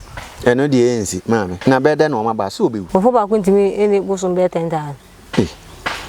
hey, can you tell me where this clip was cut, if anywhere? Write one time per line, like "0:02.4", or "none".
0:01.5
0:02.8

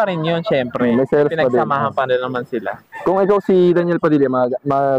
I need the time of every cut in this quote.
none

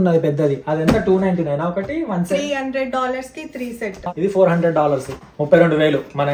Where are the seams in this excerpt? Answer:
0:04.0
0:05.1

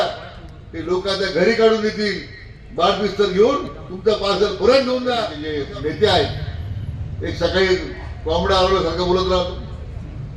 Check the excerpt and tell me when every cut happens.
0:05.5

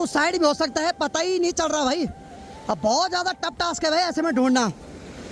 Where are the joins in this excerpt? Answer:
none

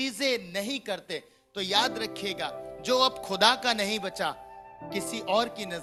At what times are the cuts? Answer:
none

